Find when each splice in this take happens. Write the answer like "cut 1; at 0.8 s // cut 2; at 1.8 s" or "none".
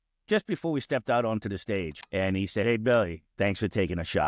cut 1; at 1.9 s // cut 2; at 3.2 s